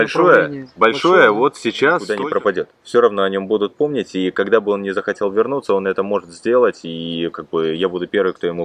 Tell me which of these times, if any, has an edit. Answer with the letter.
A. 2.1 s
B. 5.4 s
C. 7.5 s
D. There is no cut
A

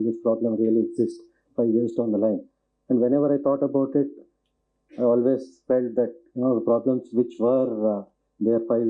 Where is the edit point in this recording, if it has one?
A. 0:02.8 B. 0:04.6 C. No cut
C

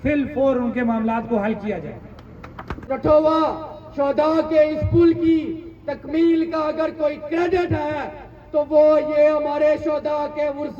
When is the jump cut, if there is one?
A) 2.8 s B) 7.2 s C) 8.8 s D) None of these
A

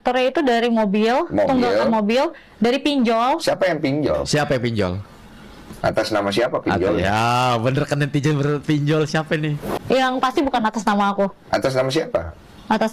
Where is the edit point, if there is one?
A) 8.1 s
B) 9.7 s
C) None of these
B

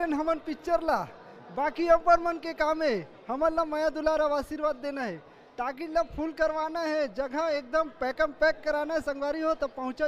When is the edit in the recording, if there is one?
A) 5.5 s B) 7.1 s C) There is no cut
C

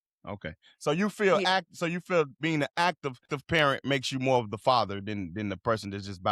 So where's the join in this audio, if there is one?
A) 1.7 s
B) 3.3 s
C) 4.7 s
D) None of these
B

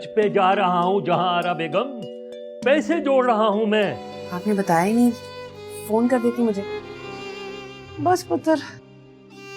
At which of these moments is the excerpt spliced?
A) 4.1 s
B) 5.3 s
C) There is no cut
A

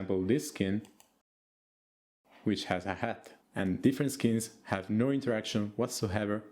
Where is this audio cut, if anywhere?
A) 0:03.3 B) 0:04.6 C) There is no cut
A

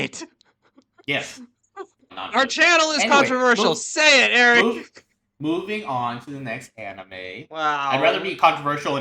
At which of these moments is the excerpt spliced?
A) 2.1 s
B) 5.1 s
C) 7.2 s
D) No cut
A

